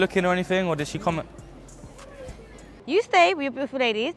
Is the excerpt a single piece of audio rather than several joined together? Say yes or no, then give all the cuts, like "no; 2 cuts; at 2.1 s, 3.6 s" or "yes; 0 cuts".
no; 1 cut; at 2.7 s